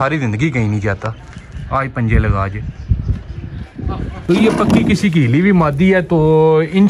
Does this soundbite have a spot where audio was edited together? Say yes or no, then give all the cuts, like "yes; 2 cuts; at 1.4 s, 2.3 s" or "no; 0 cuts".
yes; 1 cut; at 4.2 s